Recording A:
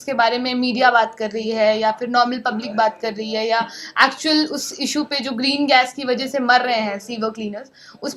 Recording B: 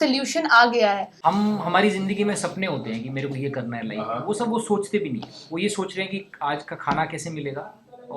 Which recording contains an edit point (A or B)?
B